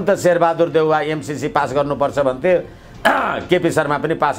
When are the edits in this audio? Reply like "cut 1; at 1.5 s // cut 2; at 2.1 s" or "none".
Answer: none